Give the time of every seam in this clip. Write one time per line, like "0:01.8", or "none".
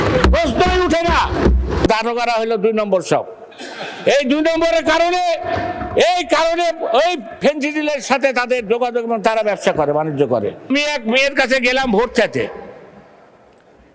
0:01.9
0:10.7